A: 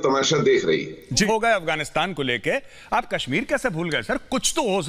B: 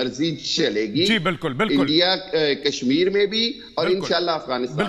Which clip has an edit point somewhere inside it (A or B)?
A